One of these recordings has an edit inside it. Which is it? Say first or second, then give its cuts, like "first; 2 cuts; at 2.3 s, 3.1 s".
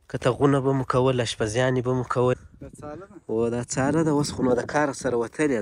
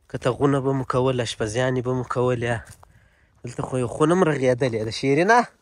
first; 1 cut; at 2.4 s